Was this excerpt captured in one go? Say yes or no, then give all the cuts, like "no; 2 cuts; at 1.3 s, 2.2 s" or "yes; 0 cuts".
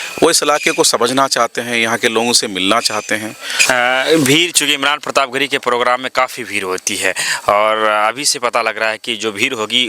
no; 1 cut; at 3.5 s